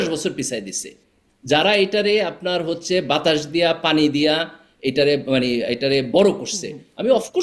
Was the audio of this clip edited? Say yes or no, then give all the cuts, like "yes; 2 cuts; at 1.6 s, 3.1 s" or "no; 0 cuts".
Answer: no; 0 cuts